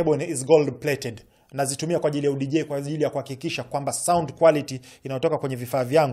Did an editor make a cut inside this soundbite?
no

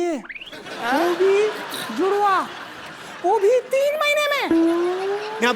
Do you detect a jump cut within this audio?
no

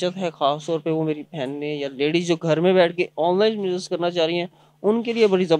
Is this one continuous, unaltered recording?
yes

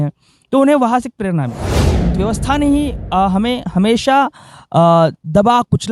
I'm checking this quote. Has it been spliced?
yes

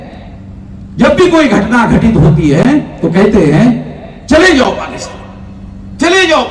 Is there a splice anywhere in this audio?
no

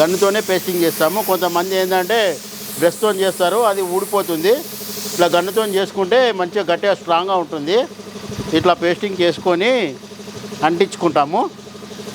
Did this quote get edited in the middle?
no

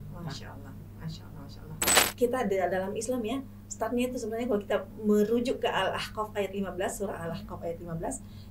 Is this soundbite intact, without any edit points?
no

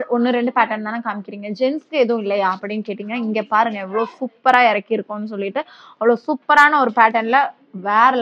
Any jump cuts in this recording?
no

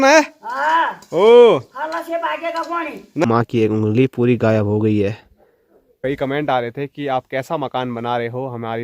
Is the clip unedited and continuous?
no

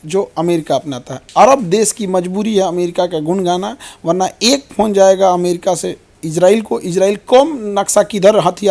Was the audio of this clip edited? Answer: no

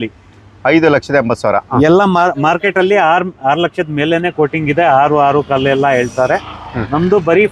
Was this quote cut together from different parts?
no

